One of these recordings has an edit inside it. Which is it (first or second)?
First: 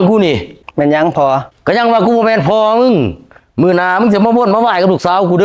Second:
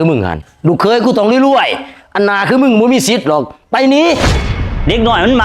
second